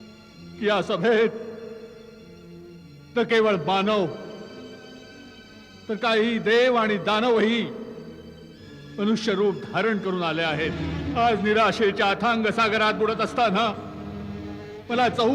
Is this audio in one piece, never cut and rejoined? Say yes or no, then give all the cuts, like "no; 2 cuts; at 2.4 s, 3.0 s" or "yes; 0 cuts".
no; 1 cut; at 10.9 s